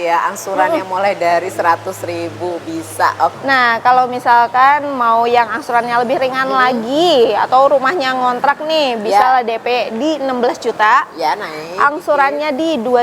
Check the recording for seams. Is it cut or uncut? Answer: cut